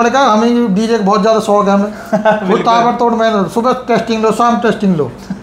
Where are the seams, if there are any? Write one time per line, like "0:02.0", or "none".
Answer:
none